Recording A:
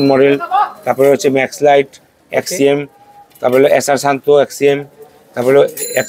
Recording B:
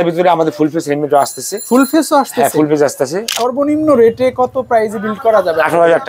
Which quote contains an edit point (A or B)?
B